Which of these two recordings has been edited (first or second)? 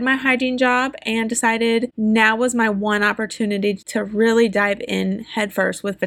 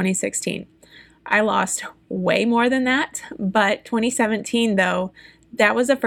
first